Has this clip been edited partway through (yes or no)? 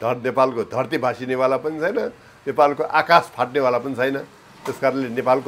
no